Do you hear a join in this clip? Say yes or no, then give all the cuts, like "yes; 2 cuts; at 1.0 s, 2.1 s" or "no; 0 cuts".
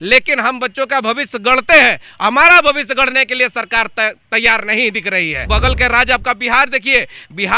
yes; 1 cut; at 5.4 s